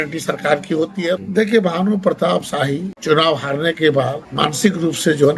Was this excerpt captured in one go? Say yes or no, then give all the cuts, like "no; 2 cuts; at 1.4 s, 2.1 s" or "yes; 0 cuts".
no; 3 cuts; at 1.1 s, 2.9 s, 4.2 s